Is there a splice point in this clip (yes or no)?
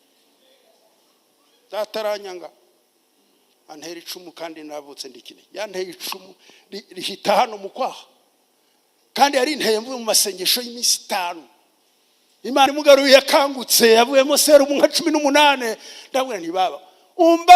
yes